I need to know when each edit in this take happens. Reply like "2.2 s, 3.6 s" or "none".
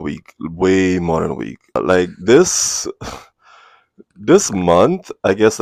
1.8 s